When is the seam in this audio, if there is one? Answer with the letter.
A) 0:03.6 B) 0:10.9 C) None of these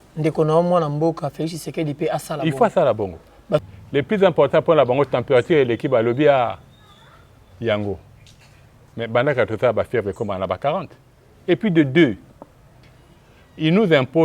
A